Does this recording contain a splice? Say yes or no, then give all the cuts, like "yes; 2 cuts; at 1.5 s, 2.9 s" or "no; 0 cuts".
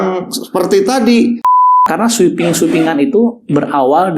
yes; 1 cut; at 1.8 s